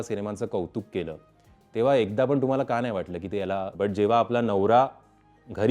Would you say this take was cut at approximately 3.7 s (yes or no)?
yes